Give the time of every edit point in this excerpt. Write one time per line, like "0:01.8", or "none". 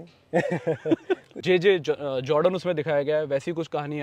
0:01.4